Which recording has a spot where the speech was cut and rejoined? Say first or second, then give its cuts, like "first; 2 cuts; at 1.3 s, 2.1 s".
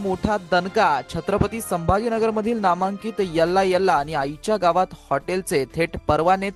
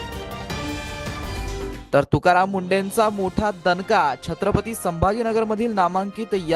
second; 1 cut; at 1.8 s